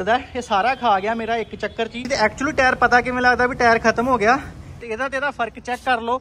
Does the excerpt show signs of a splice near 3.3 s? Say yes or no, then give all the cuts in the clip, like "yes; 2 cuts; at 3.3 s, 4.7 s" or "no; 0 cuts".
no; 2 cuts; at 2.0 s, 4.7 s